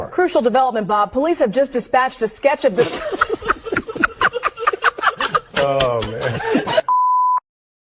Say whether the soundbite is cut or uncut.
uncut